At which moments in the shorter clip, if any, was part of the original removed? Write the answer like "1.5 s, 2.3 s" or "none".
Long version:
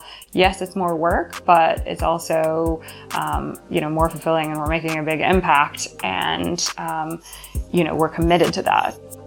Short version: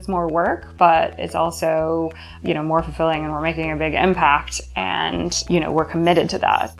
2.3 s, 5.4 s